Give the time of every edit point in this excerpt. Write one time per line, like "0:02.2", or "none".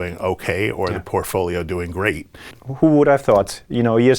0:02.6

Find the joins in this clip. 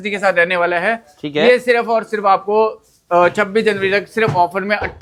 none

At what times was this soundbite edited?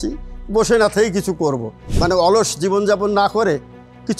0:01.9

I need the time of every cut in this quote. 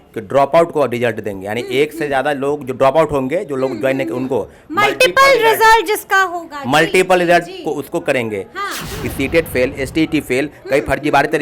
0:08.9

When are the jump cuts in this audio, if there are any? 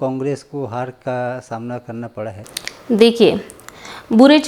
0:02.5

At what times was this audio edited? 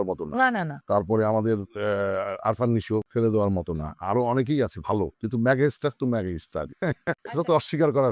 0:03.1
0:05.2
0:07.2

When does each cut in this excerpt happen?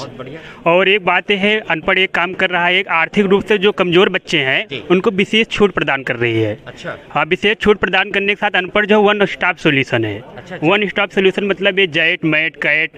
none

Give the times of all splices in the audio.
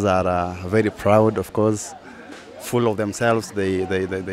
none

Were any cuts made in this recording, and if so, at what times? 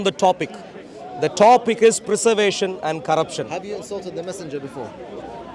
none

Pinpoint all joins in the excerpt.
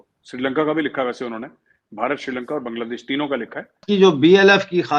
0:03.8

